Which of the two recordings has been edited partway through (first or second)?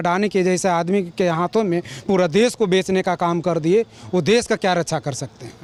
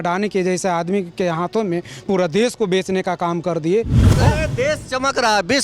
second